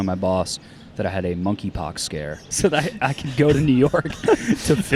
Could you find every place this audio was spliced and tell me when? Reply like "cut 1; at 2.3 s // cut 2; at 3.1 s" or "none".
cut 1; at 2.5 s